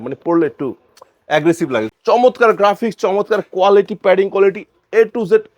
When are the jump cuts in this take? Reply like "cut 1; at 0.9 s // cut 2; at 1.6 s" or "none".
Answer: cut 1; at 1.9 s